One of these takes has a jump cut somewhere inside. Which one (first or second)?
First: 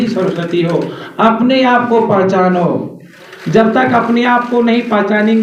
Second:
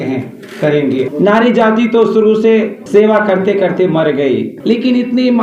second